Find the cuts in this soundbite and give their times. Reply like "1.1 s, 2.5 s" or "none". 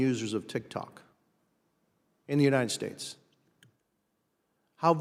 none